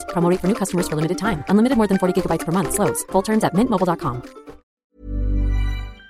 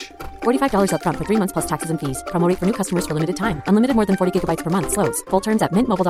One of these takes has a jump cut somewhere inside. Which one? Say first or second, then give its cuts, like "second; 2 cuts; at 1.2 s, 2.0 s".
first; 1 cut; at 4.8 s